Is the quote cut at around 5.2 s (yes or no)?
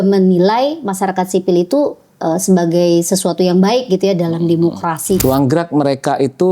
yes